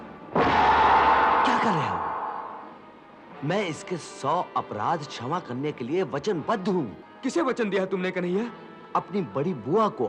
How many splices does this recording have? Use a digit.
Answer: 1